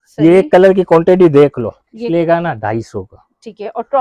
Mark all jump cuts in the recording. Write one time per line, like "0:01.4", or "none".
0:02.0